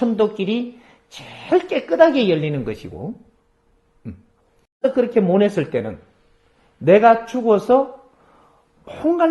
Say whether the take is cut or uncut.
cut